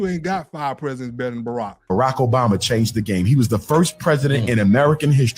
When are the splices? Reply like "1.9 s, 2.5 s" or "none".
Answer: 1.8 s